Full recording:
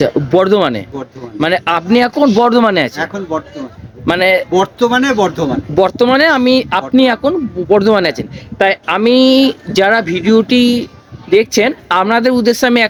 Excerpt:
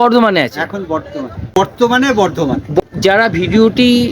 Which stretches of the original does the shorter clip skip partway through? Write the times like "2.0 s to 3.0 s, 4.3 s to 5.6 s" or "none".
4.0 s to 4.6 s, 5.8 s to 9.5 s

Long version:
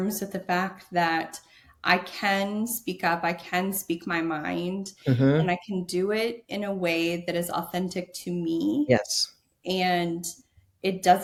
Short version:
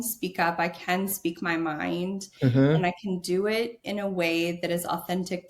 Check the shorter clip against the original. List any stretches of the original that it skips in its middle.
none

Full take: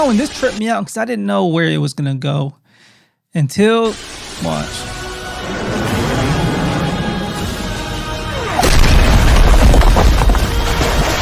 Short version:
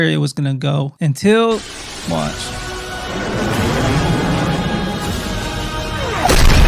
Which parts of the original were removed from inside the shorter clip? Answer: 2.5 s to 3.2 s

